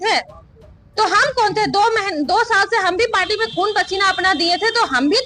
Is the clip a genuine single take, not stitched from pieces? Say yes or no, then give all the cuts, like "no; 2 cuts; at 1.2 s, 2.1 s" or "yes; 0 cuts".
yes; 0 cuts